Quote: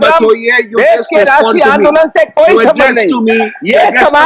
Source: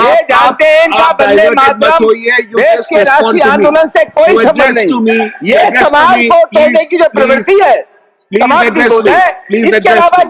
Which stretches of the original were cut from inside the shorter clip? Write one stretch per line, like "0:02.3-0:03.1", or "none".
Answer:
none